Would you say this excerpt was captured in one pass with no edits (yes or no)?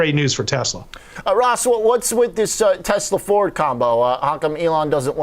no